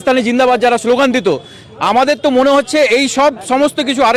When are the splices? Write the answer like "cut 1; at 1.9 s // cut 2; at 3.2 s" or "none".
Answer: none